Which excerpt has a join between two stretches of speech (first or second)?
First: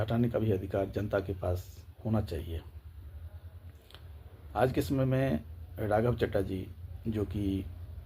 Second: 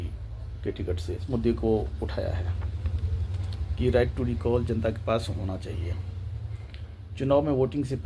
second